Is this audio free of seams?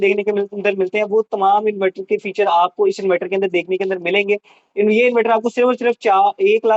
yes; 0 cuts

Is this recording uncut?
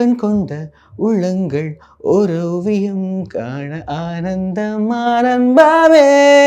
yes; 0 cuts

